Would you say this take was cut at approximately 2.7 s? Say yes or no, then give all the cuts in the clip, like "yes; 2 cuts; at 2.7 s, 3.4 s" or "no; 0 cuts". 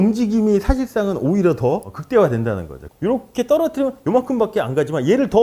yes; 1 cut; at 2.7 s